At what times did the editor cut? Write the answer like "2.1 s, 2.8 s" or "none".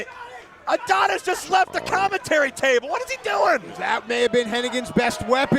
2.7 s